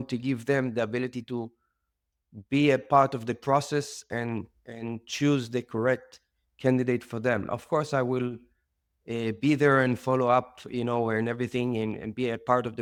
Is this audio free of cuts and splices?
yes; 0 cuts

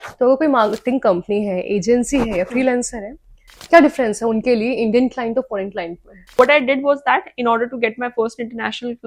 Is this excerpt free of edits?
no; 1 cut; at 6.3 s

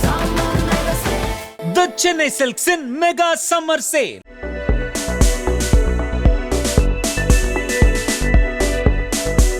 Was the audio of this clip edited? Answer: no; 0 cuts

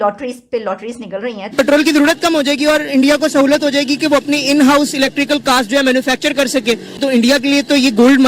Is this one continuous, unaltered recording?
no; 2 cuts; at 1.6 s, 6.9 s

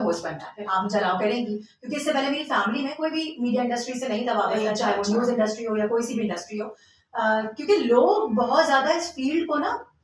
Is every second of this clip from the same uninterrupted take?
yes; 0 cuts

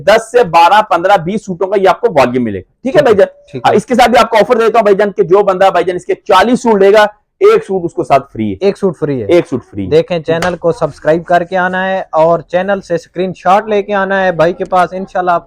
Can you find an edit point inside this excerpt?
no; 0 cuts

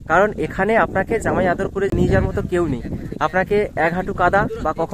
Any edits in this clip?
yes; 1 cut; at 1.9 s

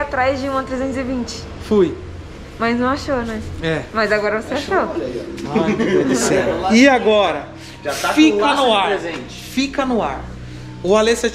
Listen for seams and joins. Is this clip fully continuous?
yes; 0 cuts

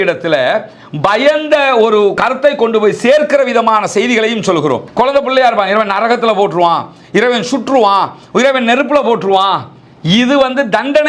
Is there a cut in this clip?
yes; 2 cuts; at 2.2 s, 4.8 s

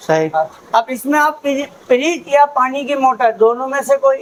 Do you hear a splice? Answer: no; 0 cuts

